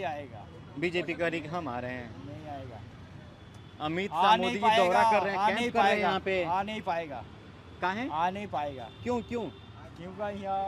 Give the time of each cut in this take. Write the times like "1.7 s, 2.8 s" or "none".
none